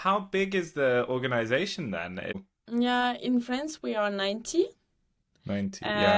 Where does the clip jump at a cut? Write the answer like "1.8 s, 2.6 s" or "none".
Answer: 2.4 s

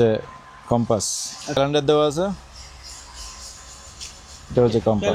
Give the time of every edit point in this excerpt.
1.6 s

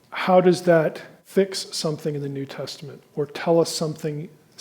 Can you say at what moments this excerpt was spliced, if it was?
1.1 s

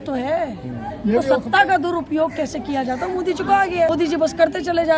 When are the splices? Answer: 3.9 s

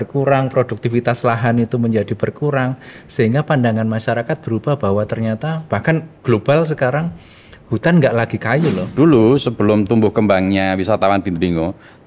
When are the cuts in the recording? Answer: 8.8 s

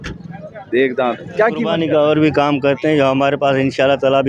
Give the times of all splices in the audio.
1.7 s

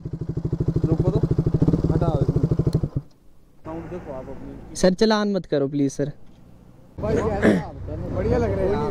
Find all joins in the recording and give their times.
3.7 s, 7.0 s

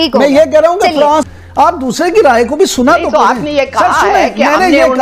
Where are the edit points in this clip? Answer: 1.4 s

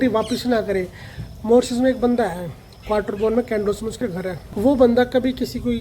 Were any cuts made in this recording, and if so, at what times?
4.4 s

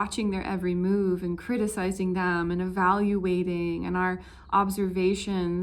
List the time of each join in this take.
none

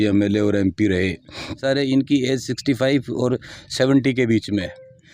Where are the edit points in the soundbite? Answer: 1.6 s

